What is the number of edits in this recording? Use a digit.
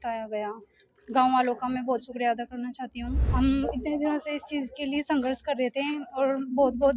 1